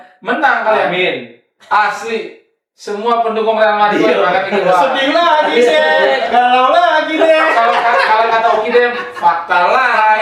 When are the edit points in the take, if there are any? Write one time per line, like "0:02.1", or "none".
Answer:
none